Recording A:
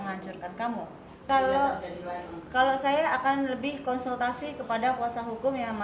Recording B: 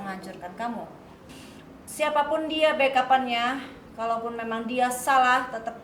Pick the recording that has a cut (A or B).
B